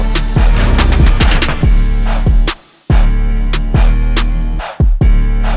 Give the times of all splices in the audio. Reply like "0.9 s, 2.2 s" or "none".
none